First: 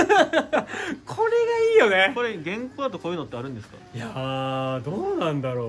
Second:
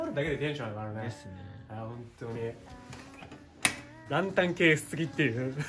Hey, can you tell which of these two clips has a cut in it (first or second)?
second